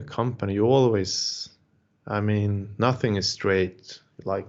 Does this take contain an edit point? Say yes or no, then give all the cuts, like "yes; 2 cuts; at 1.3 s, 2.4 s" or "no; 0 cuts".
no; 0 cuts